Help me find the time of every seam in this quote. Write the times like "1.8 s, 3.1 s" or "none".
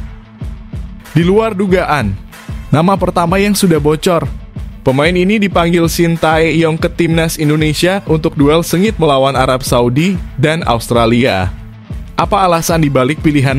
1.1 s

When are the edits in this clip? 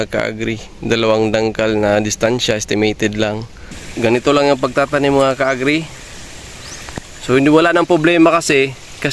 3.8 s

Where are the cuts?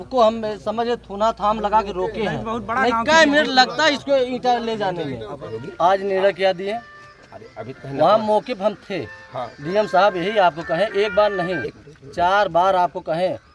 5.6 s

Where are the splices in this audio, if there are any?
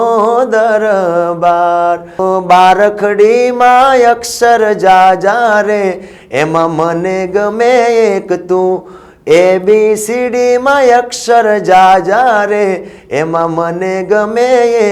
2.2 s

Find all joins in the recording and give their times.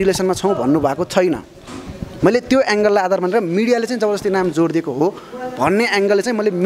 none

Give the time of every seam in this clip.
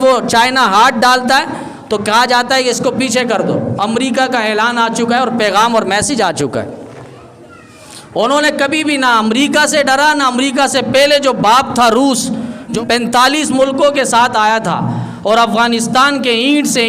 12.7 s

